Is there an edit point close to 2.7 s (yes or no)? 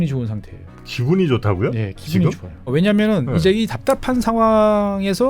yes